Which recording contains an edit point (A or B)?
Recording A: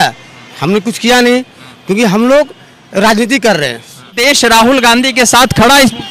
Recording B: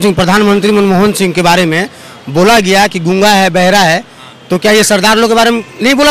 A